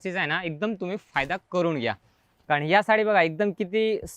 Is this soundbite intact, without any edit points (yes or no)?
yes